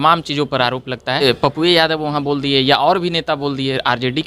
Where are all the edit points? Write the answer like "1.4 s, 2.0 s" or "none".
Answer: 1.2 s